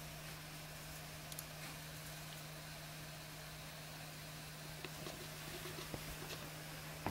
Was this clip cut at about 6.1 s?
no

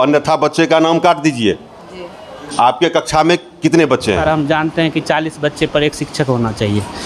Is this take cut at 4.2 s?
yes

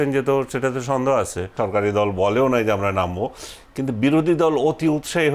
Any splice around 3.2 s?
no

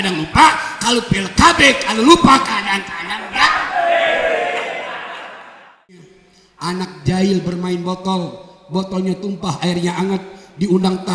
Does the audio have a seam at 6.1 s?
yes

